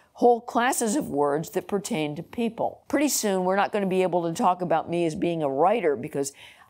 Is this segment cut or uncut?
cut